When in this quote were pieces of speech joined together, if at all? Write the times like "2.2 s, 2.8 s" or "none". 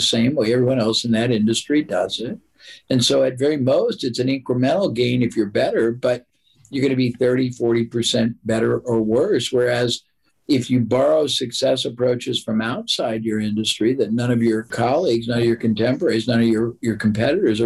none